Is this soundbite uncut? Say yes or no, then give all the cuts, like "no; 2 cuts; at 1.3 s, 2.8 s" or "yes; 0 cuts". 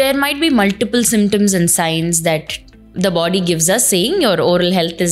yes; 0 cuts